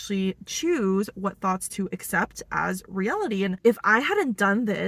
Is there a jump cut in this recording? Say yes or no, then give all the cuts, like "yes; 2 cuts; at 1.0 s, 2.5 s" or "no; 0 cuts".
yes; 1 cut; at 3.5 s